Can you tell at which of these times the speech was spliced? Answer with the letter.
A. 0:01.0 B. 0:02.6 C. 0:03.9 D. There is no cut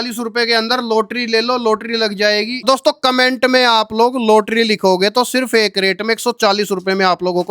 B